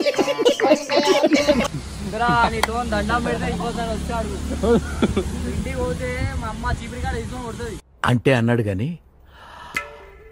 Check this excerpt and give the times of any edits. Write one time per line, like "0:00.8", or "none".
none